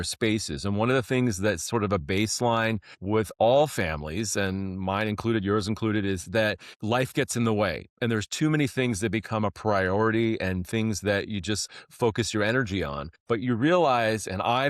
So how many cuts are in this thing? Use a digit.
3